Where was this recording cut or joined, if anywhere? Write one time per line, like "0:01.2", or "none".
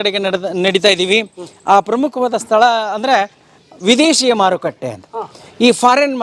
none

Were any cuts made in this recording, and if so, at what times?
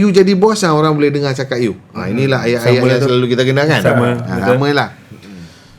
none

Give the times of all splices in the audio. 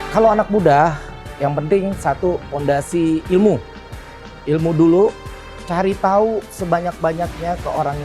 none

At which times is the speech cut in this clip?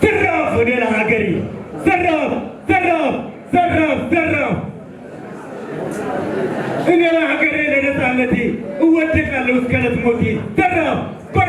none

